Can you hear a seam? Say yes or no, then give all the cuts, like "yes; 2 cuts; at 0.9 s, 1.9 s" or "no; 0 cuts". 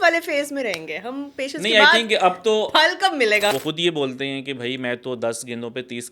yes; 1 cut; at 3.5 s